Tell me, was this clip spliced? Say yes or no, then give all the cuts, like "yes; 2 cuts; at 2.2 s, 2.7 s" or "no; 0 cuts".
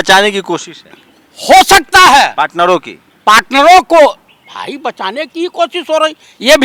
no; 0 cuts